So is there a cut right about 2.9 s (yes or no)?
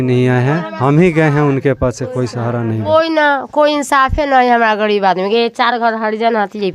yes